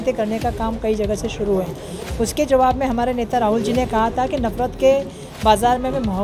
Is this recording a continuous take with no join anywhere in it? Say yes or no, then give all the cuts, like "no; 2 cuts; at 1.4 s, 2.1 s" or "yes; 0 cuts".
yes; 0 cuts